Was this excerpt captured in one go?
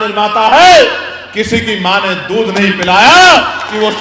no; 1 cut; at 2.5 s

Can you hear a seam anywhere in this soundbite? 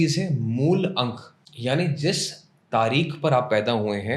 yes; 1 cut; at 1.4 s

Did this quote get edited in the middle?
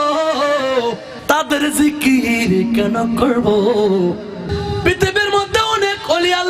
yes; 2 cuts; at 1.1 s, 4.5 s

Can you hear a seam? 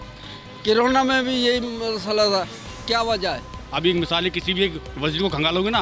yes; 1 cut; at 3.5 s

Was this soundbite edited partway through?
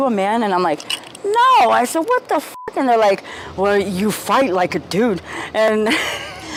no; 0 cuts

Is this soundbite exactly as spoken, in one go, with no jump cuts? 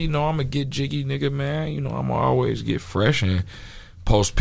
yes; 0 cuts

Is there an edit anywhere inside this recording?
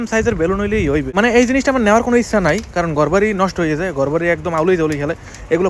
yes; 1 cut; at 1.1 s

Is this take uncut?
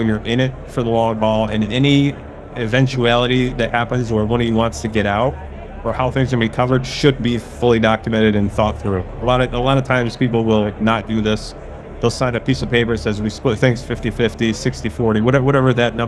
yes; 0 cuts

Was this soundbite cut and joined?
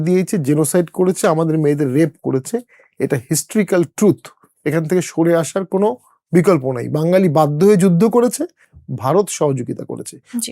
no; 0 cuts

